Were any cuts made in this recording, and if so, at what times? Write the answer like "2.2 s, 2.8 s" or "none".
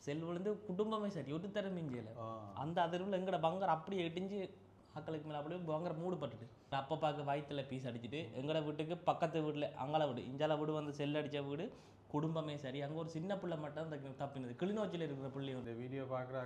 6.7 s, 15.6 s